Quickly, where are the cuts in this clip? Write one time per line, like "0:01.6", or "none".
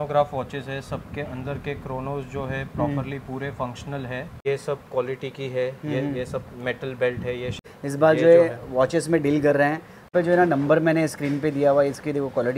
0:04.3
0:07.6
0:10.1

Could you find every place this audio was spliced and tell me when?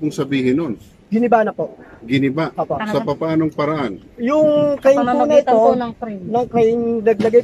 none

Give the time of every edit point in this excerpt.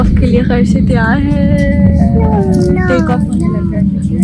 none

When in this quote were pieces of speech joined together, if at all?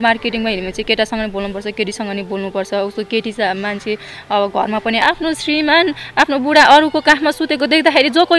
0:05.0

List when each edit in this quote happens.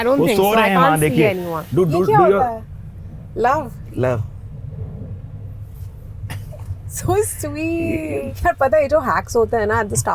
0:01.6
0:08.3

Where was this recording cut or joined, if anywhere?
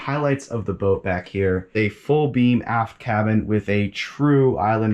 none

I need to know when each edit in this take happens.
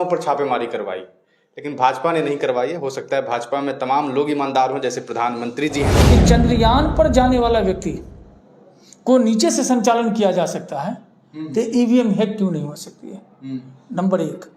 0:06.0

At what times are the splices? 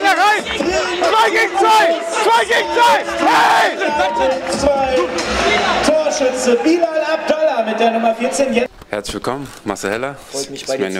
0:08.7

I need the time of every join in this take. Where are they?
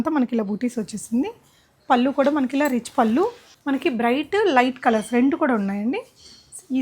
0:03.5

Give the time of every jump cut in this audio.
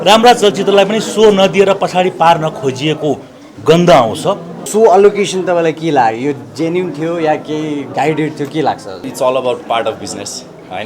0:04.5
0:09.1

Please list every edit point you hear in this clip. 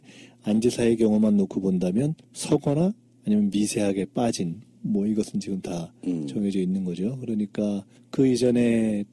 0:01.7

